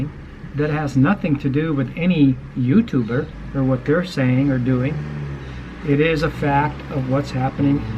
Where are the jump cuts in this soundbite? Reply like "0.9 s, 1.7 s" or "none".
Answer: 3.4 s